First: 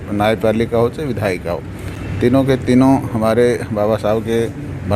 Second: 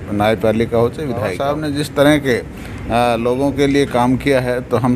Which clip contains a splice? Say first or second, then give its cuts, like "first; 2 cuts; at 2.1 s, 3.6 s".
second; 1 cut; at 1.4 s